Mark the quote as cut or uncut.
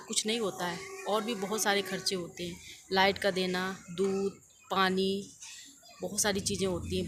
uncut